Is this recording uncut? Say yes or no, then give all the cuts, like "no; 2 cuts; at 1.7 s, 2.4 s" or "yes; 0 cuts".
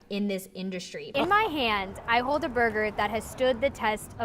no; 1 cut; at 1.1 s